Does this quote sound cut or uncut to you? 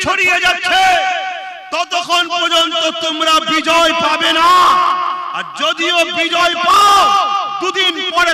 uncut